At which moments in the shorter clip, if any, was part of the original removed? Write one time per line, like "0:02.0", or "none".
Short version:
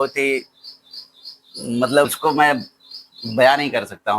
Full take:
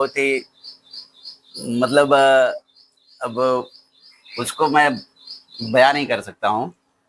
0:02.1